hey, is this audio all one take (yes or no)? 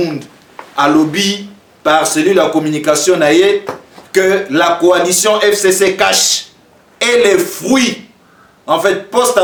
yes